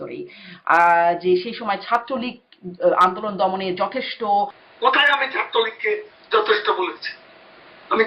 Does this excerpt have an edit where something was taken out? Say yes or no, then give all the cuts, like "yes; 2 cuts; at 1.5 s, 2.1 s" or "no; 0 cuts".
yes; 1 cut; at 4.6 s